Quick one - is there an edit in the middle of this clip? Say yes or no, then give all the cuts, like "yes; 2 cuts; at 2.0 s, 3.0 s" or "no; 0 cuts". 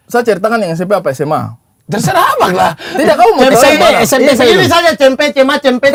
no; 0 cuts